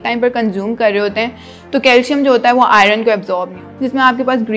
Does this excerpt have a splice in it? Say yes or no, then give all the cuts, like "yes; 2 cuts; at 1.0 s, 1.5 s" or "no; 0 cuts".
yes; 1 cut; at 3.6 s